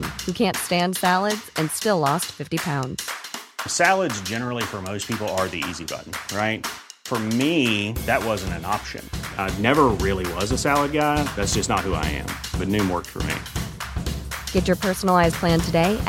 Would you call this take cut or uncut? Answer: uncut